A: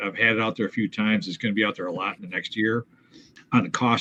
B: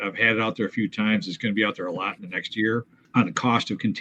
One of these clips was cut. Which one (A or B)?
B